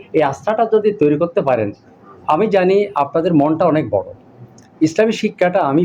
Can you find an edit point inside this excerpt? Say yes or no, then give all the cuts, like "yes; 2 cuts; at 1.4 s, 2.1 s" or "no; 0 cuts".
no; 0 cuts